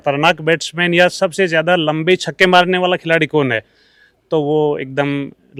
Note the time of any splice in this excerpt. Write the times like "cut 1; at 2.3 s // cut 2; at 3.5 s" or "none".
none

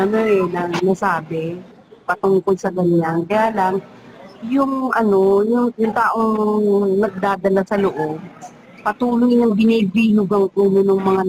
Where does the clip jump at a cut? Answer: cut 1; at 5.7 s

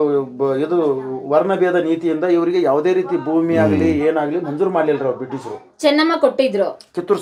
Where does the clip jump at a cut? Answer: none

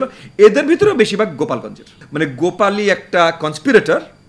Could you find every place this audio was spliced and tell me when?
cut 1; at 2.0 s

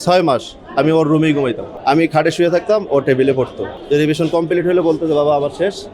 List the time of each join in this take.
cut 1; at 1.7 s // cut 2; at 3.7 s

